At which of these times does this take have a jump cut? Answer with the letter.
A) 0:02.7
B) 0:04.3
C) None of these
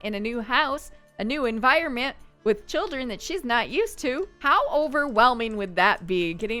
C